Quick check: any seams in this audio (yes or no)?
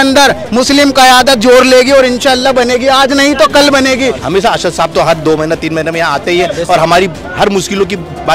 yes